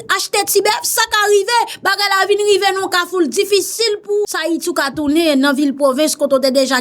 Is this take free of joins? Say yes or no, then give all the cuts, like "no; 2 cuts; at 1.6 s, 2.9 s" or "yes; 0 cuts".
no; 1 cut; at 4.4 s